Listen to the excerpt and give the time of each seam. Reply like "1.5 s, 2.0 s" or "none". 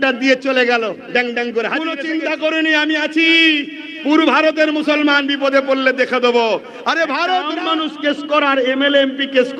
2.0 s, 7.5 s